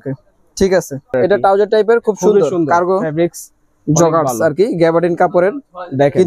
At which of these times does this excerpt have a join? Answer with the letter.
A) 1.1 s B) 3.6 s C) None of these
A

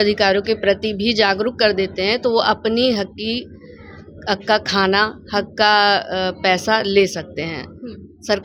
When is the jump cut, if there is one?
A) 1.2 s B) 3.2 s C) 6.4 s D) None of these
D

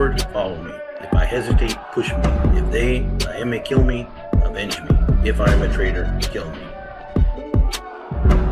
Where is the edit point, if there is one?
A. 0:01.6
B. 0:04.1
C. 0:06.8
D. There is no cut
C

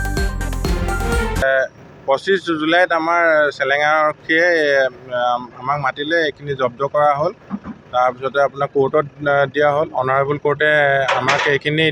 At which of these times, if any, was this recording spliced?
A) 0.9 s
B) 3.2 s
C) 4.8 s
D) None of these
A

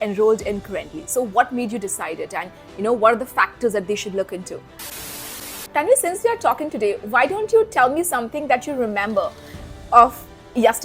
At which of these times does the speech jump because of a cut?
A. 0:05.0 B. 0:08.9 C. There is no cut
A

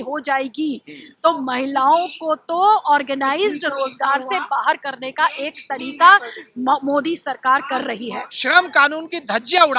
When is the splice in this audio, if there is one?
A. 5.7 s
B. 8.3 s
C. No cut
B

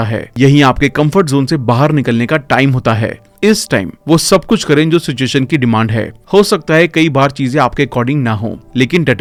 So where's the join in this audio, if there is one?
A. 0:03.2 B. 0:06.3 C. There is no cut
C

